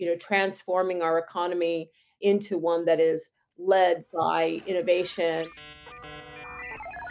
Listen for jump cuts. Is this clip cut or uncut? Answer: cut